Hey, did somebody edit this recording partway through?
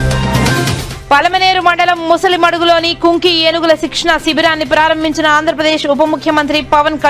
yes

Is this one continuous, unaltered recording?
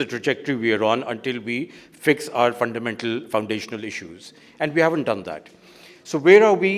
yes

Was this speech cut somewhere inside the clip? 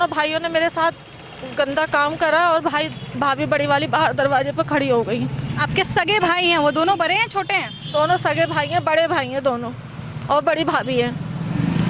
no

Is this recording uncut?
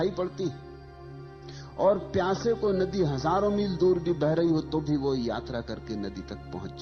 yes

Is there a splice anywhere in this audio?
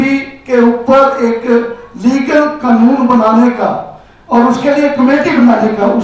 no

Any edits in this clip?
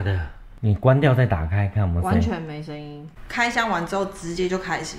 yes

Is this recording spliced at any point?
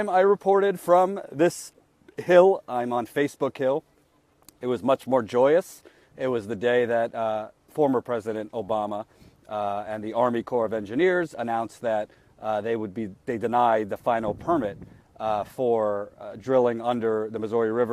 yes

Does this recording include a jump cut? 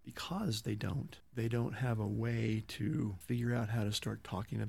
yes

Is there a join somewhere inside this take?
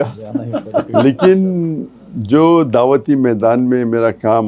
no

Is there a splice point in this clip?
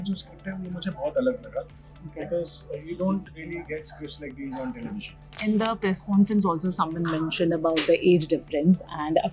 yes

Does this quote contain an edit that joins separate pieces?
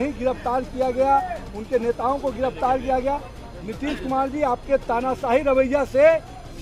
no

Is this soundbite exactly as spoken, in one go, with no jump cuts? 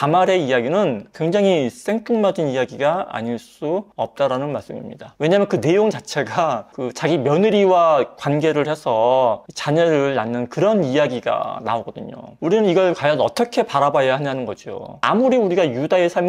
no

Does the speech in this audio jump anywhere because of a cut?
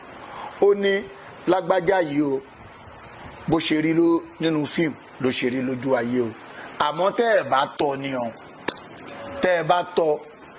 no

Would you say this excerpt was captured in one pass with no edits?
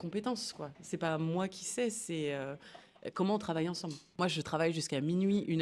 no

